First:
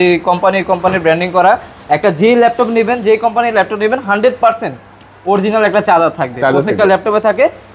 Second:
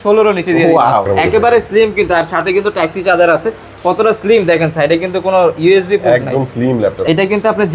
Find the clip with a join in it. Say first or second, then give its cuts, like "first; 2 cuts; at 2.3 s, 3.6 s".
second; 2 cuts; at 1.1 s, 7.0 s